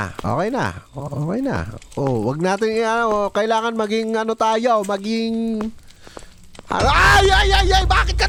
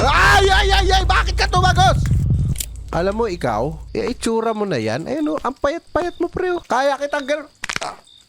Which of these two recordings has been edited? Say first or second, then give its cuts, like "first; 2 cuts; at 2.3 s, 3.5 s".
second; 3 cuts; at 2.5 s, 3.8 s, 6.6 s